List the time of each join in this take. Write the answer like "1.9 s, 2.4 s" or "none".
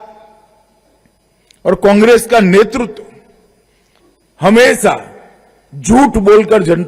none